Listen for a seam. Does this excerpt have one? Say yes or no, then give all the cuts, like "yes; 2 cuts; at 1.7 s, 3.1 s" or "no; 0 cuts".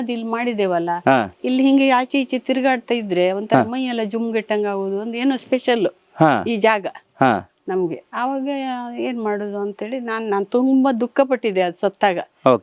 no; 0 cuts